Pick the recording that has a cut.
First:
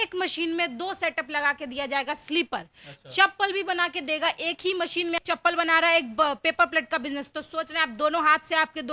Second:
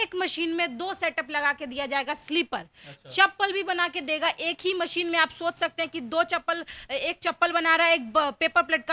first; 1 cut; at 5.2 s

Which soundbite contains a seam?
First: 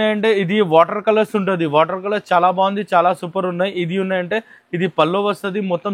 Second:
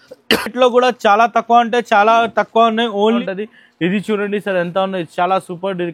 second; 1 cut; at 3.2 s

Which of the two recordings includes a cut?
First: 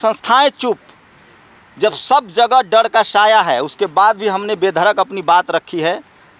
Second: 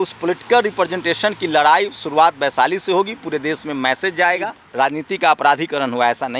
second; 1 cut; at 4.6 s

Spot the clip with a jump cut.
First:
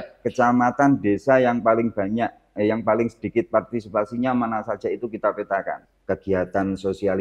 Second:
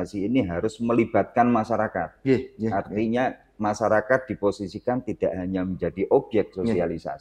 first; 1 cut; at 5.8 s

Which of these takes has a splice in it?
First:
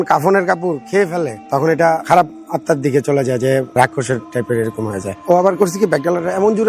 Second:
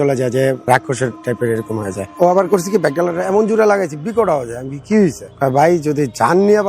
second; 1 cut; at 5.2 s

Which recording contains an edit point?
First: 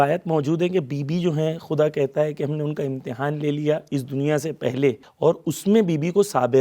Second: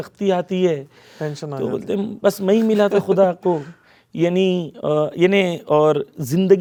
first; 1 cut; at 5.1 s

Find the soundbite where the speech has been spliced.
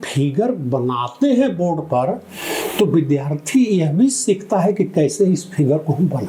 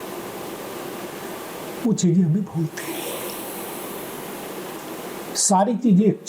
second; 1 cut; at 5.4 s

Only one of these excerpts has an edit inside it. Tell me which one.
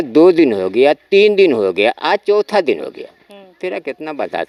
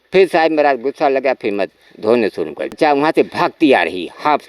second; 1 cut; at 2.8 s

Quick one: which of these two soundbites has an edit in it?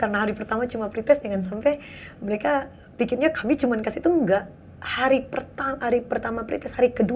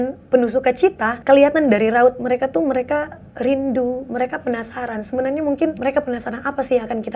second; 2 cuts; at 1.1 s, 5.8 s

